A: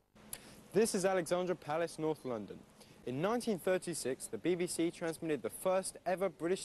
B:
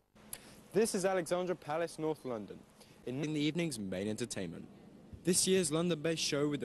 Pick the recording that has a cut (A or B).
A